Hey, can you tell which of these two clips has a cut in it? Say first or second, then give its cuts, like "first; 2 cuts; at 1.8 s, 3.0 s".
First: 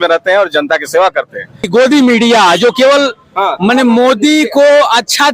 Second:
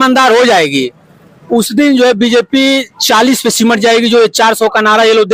first; 1 cut; at 1.7 s